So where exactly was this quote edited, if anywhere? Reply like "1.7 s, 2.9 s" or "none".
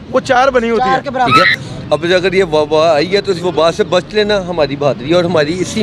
1.3 s